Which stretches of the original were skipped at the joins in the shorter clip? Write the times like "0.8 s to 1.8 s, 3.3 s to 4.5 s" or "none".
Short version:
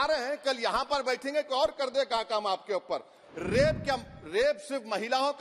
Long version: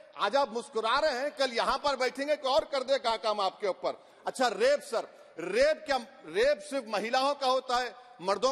4.1 s to 5.2 s